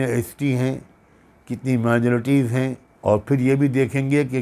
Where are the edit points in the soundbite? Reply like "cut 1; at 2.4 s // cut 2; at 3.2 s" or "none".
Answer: cut 1; at 2.9 s